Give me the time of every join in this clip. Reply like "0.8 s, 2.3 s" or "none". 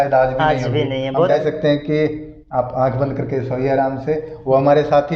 1.3 s